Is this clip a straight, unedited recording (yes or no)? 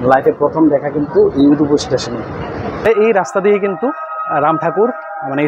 no